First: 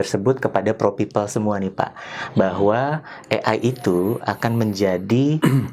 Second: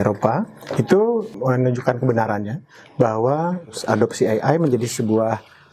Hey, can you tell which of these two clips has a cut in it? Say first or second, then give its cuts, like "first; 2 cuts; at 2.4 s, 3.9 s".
second; 2 cuts; at 1.3 s, 3.8 s